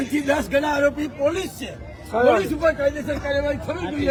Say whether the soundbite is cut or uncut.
uncut